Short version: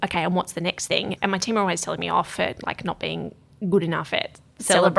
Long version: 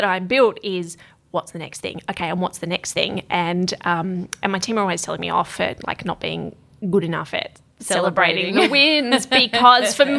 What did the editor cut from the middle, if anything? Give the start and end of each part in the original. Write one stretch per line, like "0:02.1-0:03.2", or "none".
0:03.2-0:04.3